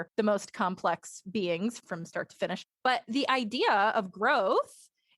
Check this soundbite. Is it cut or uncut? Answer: cut